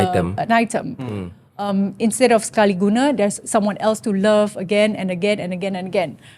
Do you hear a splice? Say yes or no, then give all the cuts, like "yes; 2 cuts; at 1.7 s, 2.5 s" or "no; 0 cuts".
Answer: no; 0 cuts